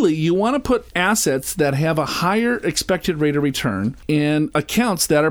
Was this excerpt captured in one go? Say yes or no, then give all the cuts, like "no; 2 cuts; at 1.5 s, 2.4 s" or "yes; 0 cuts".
no; 2 cuts; at 0.9 s, 4.0 s